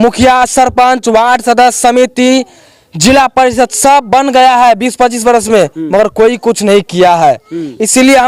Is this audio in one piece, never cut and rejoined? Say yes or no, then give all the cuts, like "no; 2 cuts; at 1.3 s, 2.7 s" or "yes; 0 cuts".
yes; 0 cuts